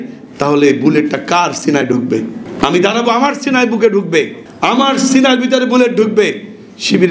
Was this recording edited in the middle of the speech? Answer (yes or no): yes